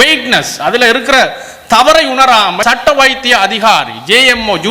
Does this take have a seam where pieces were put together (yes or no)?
yes